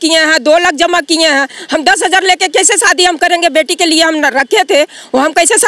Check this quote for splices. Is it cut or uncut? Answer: uncut